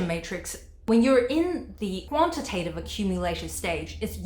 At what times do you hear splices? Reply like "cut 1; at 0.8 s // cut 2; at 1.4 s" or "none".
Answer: cut 1; at 2.0 s